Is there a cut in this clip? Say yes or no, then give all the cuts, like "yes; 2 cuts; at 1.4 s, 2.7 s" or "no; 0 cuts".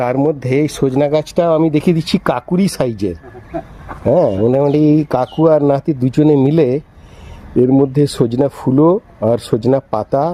no; 0 cuts